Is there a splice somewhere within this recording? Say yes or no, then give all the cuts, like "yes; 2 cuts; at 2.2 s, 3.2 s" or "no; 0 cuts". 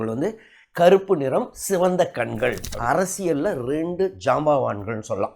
yes; 1 cut; at 2.7 s